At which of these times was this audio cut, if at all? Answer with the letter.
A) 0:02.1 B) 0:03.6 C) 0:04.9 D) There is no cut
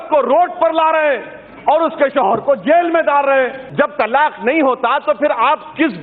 B